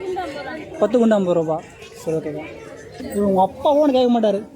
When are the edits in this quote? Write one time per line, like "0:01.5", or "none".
0:03.0